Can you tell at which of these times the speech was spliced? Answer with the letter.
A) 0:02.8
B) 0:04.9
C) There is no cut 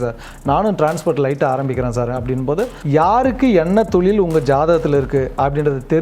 A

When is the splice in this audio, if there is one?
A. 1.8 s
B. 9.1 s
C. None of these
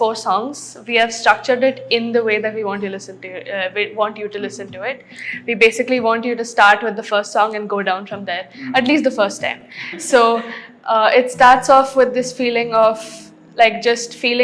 C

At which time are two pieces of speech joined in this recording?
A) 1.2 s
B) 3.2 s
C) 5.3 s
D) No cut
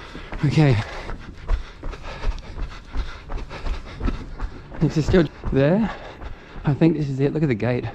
C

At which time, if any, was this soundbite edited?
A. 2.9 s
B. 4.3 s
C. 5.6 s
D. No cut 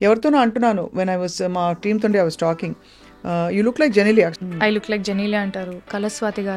B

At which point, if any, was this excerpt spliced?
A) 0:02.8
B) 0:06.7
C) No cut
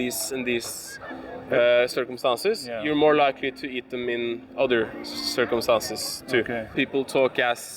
B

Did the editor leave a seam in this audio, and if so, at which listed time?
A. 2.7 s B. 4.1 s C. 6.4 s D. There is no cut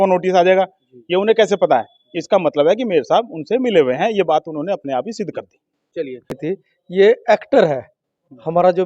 C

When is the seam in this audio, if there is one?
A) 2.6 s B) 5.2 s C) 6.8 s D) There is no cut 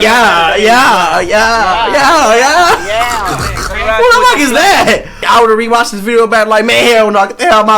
B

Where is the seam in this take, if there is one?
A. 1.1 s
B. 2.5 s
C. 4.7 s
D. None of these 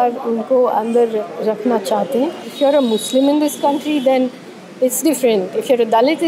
B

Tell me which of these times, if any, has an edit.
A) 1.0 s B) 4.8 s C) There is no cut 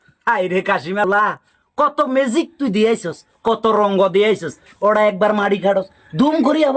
A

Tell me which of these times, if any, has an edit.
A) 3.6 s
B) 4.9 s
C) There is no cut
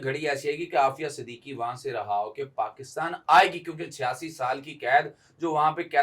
C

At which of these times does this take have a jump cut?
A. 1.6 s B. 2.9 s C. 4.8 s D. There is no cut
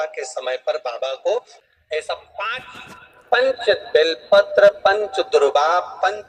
A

